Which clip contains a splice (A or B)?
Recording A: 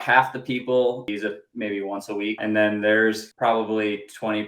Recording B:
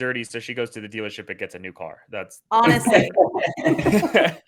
A